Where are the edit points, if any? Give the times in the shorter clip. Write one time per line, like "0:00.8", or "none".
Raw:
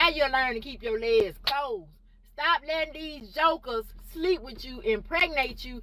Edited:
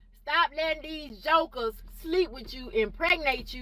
none